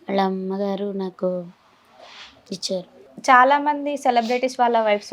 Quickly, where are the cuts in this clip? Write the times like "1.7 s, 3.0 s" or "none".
3.0 s